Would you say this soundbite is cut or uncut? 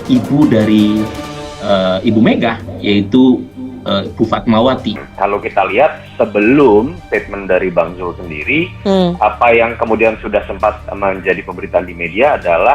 cut